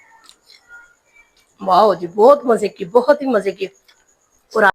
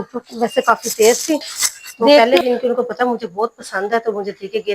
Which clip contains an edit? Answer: second; 1 cut; at 2.2 s

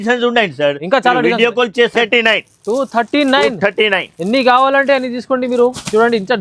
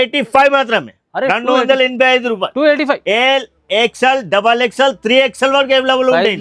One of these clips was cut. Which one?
first; 1 cut; at 2.1 s

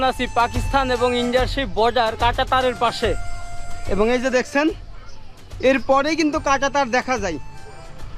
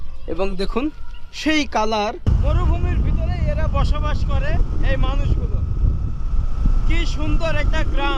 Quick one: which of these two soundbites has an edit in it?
second; 1 cut; at 2.3 s

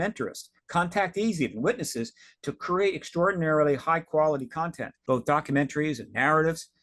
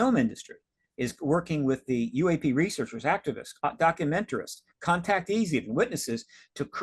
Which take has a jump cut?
first; 1 cut; at 4.9 s

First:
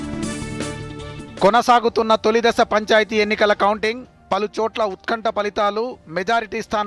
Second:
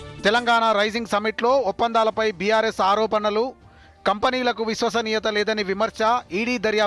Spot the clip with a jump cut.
first; 1 cut; at 1.1 s

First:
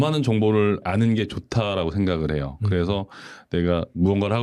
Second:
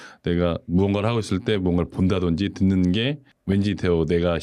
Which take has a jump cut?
second; 1 cut; at 3.3 s

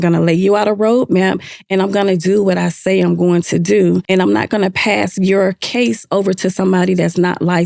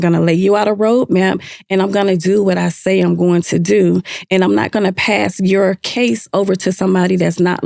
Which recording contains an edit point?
first; 1 cut; at 4.0 s

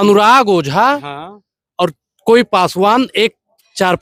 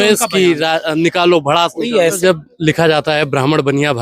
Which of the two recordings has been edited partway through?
second; 1 cut; at 2.2 s

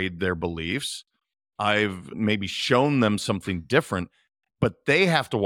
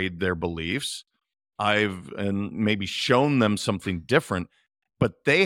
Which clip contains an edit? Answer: first; 1 cut; at 2.1 s

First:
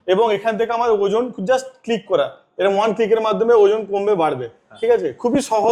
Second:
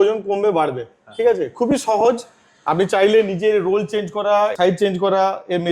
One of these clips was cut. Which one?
second; 1 cut; at 4.5 s

